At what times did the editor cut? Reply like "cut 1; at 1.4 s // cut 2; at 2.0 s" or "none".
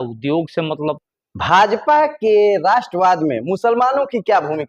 cut 1; at 1.0 s